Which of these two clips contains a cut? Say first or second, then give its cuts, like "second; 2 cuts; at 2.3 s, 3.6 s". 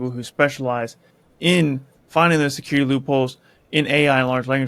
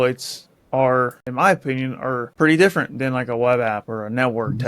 second; 2 cuts; at 1.2 s, 2.3 s